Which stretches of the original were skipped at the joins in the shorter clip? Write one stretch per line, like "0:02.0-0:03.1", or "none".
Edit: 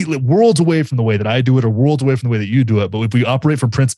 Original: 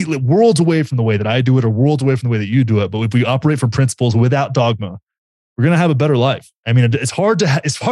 none